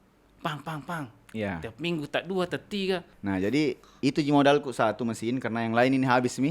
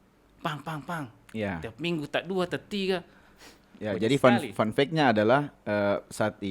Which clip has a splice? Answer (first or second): first